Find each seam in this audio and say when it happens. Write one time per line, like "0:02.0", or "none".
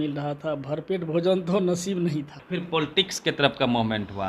0:02.4